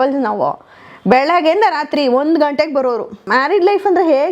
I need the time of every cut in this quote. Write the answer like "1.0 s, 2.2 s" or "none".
3.2 s